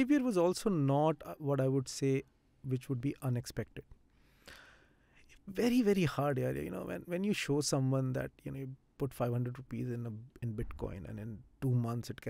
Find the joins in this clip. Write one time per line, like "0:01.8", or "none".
none